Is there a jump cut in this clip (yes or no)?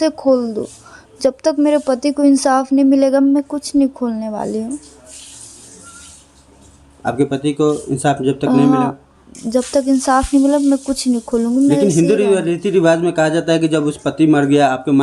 no